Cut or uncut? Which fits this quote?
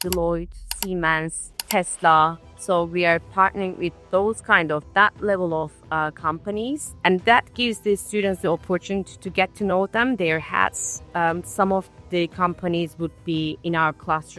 uncut